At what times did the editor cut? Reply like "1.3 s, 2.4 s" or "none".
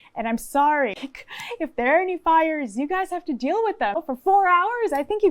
1.0 s, 4.0 s